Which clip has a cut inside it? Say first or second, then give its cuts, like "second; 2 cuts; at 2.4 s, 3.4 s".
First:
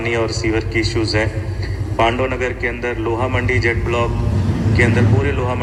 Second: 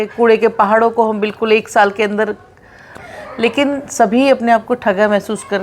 second; 1 cut; at 2.9 s